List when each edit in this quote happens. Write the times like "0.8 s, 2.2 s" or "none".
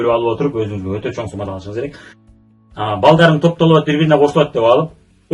2.5 s